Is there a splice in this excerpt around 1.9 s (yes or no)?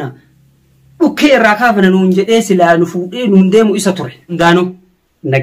no